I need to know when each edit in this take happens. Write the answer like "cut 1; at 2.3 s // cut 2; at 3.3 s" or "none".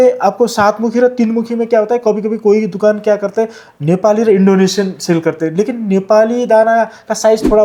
none